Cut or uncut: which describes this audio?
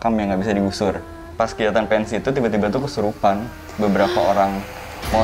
cut